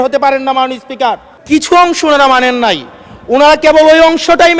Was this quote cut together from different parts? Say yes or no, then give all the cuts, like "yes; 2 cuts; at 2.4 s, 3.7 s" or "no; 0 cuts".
yes; 1 cut; at 1.3 s